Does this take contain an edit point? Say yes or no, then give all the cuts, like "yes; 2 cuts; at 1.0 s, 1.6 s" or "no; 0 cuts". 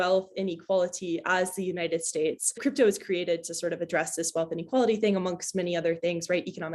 no; 0 cuts